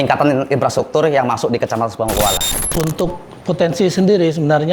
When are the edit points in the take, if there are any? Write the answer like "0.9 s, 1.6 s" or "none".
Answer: 2.4 s